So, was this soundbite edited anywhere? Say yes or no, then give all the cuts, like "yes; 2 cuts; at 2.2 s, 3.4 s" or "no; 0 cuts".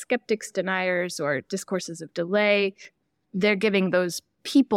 no; 0 cuts